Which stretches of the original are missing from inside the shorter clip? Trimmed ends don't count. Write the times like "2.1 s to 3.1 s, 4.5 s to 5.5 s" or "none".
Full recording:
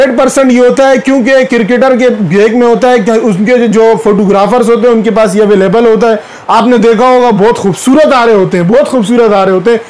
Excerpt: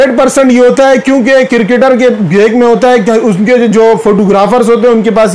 none